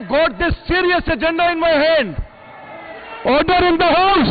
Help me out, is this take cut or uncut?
uncut